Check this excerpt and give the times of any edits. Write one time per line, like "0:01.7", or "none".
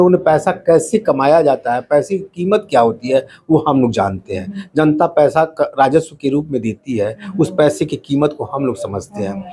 none